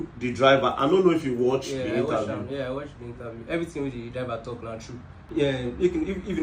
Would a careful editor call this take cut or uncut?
cut